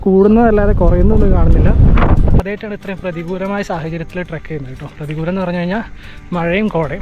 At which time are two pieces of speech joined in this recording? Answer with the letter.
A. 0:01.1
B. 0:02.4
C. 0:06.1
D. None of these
B